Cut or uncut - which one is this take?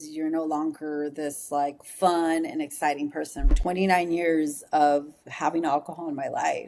cut